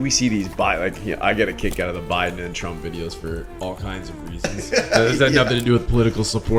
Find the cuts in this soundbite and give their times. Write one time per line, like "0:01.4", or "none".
none

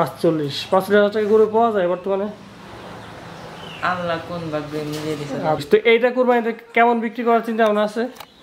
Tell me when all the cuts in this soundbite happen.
0:05.6

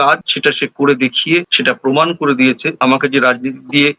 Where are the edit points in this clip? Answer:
0:01.5
0:02.8

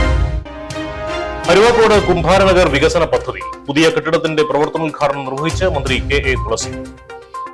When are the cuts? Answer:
0:01.4

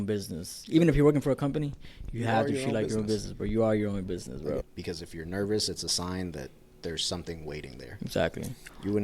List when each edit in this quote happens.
0:04.6

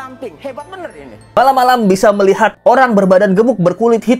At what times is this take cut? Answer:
0:01.4

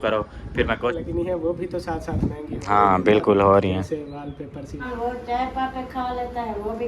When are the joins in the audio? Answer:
0:00.9
0:04.8

